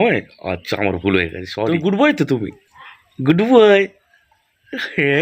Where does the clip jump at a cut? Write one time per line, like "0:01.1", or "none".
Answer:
0:01.7

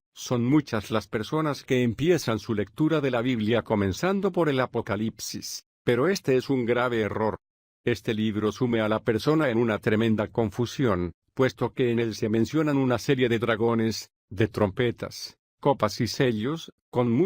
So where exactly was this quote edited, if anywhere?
0:02.7

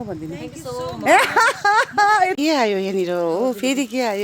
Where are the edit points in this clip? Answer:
0:02.3

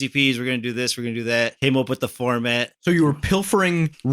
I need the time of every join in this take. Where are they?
0:01.5

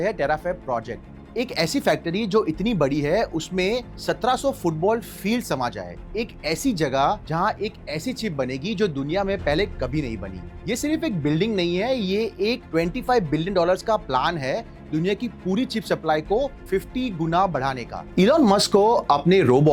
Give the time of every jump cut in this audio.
0:01.2

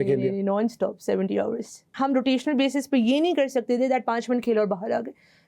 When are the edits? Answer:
0:01.9

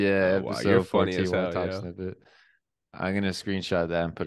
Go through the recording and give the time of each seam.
none

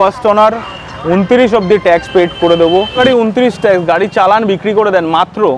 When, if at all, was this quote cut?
0:03.0

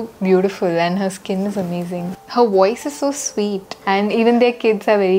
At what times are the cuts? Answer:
0:02.1
0:03.8

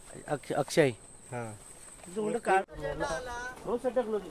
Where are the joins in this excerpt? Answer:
0:02.8

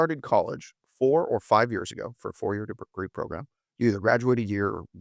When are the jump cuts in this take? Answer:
none

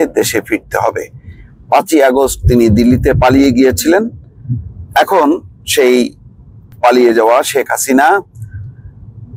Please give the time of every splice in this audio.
none

